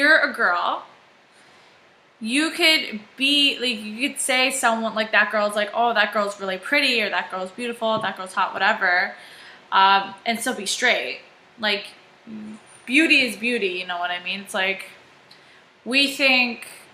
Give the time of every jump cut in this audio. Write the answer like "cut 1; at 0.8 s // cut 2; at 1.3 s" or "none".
cut 1; at 15.9 s